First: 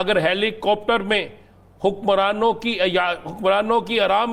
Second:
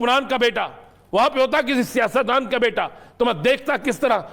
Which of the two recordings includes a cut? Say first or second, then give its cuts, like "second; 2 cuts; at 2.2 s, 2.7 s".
second; 1 cut; at 3.0 s